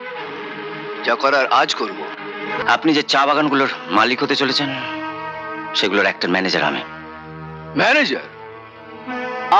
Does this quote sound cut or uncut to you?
cut